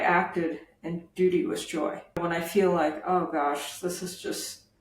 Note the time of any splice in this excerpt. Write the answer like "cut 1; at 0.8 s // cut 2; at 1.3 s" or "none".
cut 1; at 2.2 s